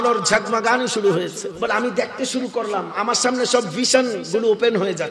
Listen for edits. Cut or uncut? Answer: cut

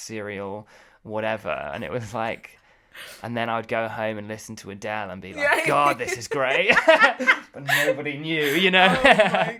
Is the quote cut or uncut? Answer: uncut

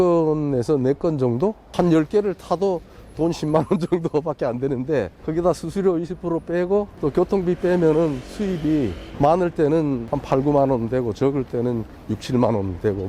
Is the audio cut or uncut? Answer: cut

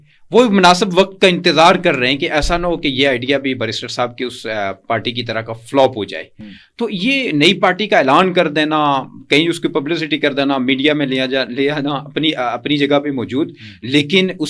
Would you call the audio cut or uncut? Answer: uncut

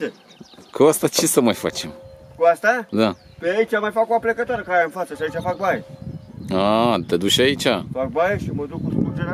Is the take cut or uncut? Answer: uncut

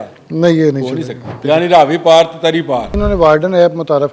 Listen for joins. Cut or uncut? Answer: cut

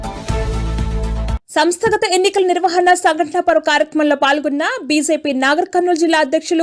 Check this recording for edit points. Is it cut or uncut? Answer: cut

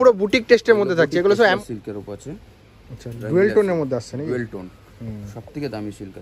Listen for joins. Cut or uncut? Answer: cut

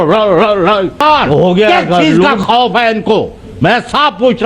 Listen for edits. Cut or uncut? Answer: cut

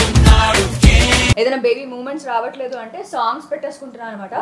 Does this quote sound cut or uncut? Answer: cut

